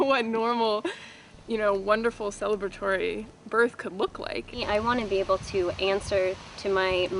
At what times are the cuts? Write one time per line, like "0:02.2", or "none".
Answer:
0:04.6